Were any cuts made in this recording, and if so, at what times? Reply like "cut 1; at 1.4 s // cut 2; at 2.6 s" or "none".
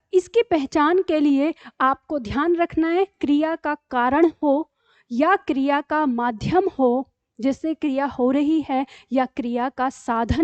none